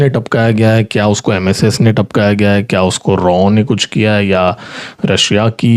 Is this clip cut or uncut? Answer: uncut